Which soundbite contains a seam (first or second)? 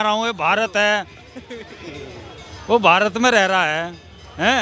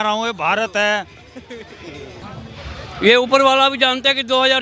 second